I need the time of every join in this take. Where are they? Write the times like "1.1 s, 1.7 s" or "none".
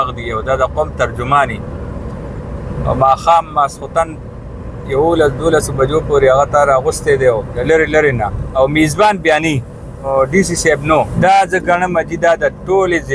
7.6 s, 8.4 s, 10.1 s, 11.1 s